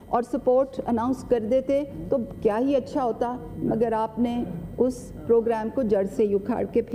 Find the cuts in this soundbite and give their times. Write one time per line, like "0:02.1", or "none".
none